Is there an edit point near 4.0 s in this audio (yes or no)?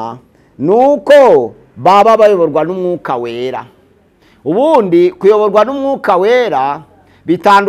no